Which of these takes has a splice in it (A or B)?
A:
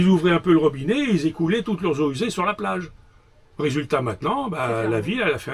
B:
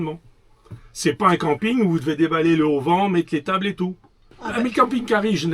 B